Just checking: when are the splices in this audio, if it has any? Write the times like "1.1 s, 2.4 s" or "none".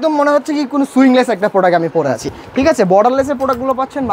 none